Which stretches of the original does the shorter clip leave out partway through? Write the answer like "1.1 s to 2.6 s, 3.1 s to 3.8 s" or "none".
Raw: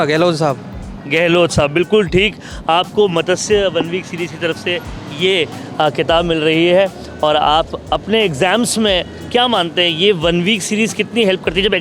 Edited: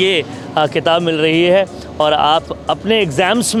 none

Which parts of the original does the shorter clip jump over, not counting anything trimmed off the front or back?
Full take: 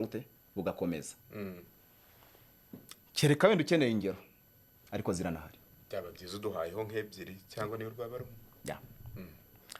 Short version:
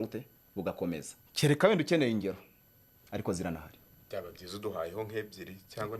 1.2 s to 3.0 s

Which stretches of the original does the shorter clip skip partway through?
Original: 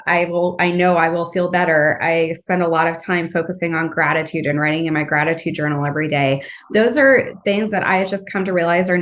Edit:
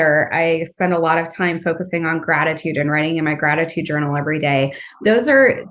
none

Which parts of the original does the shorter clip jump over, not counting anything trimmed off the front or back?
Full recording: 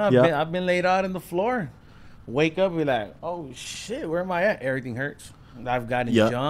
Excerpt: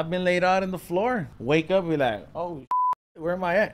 1.7 s to 2.2 s

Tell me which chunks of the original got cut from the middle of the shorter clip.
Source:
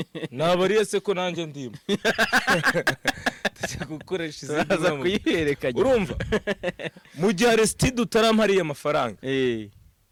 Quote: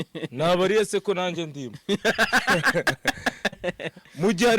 3.6 s to 6.6 s

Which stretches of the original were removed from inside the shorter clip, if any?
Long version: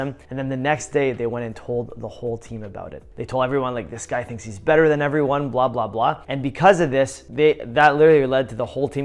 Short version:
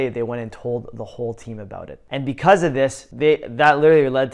3.1 s to 6.2 s

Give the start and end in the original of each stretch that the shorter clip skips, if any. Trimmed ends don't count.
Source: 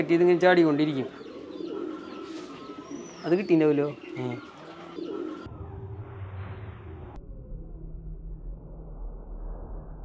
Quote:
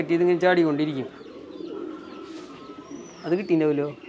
none

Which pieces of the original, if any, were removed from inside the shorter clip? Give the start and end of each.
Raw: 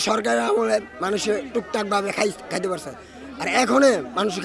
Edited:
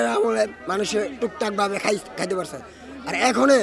none

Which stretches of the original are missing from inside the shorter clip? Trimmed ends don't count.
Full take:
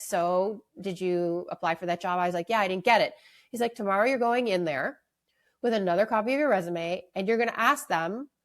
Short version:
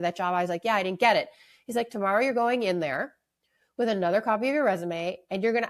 none

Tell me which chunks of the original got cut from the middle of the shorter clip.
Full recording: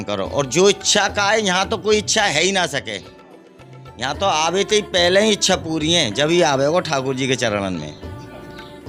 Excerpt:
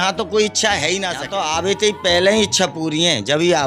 2.7 s to 4.1 s

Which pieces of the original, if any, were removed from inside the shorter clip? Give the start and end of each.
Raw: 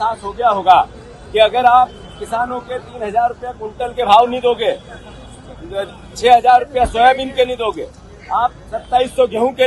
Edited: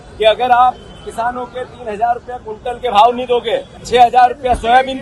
4.9 s to 6.0 s

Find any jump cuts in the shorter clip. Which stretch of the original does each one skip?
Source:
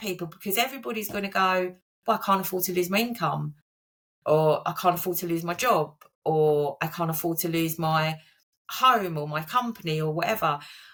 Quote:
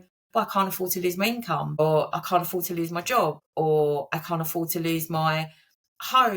3.5 s to 4.3 s, 6.0 s to 6.1 s

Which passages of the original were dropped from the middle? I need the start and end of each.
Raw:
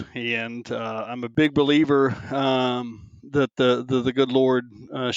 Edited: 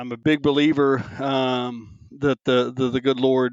none

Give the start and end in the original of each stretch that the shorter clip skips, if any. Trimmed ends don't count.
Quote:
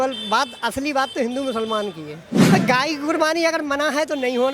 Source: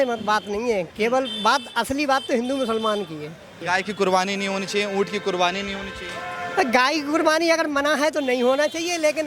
3.6 s to 6.5 s

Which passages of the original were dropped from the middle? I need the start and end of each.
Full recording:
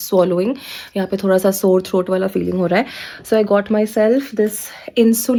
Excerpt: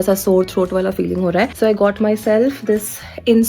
2.9 s to 3.2 s

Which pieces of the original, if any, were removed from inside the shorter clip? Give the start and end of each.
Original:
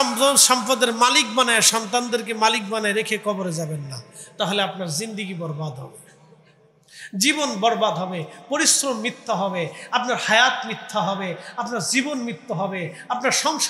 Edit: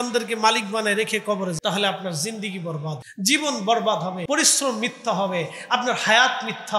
3.5 s to 4.3 s, 5.8 s to 7.0 s, 8.2 s to 8.4 s

